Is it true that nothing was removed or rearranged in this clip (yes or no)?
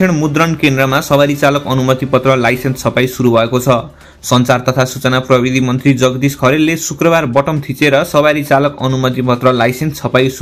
yes